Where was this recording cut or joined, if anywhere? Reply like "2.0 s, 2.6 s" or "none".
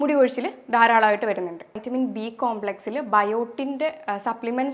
1.8 s